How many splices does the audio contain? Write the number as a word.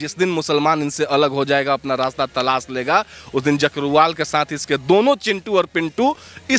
zero